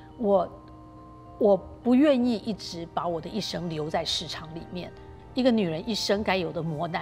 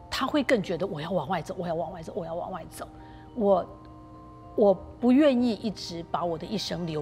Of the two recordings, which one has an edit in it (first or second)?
first